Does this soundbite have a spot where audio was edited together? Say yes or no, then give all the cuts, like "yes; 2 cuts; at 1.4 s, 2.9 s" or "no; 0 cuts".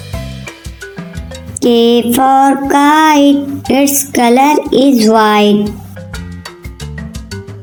no; 0 cuts